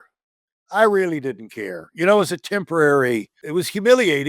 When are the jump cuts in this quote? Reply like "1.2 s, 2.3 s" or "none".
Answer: 3.4 s